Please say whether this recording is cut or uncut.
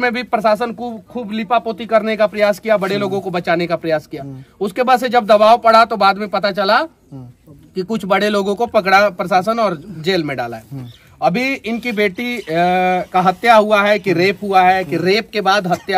uncut